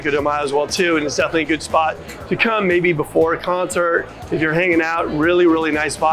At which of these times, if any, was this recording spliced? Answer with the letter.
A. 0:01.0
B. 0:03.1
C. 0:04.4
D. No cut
D